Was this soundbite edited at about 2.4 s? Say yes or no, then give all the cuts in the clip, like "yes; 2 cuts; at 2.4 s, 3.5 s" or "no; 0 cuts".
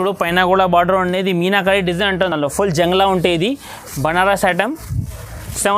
no; 0 cuts